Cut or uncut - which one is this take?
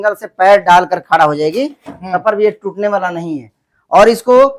uncut